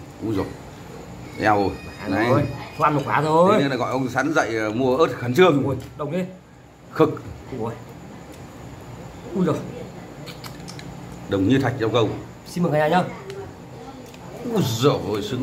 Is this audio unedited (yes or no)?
yes